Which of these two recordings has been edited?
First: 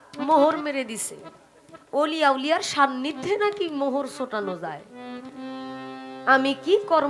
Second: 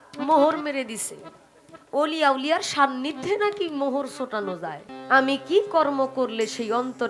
second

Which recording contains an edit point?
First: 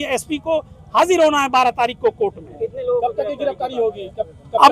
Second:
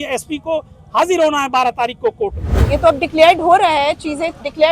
second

